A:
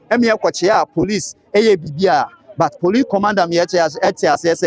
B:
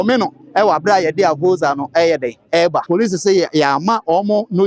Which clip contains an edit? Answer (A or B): B